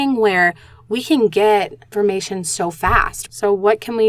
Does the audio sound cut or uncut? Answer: cut